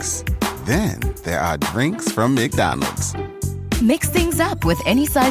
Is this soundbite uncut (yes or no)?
yes